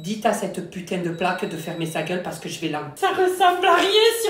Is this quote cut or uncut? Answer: cut